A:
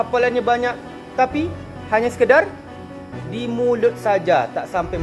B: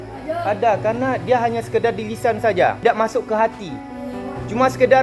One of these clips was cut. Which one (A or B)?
B